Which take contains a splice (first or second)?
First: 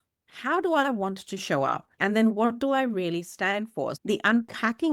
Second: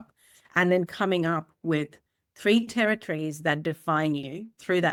first